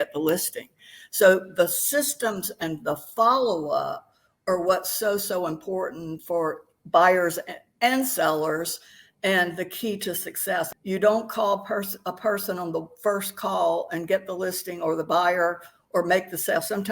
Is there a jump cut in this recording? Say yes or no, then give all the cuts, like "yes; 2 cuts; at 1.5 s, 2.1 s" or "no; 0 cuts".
yes; 1 cut; at 10.7 s